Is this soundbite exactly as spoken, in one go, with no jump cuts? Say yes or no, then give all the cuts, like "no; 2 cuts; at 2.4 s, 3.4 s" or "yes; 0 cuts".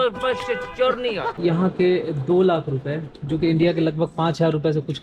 no; 1 cut; at 1.3 s